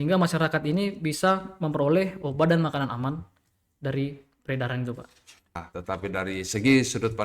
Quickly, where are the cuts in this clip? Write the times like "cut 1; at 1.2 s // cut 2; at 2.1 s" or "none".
cut 1; at 5.5 s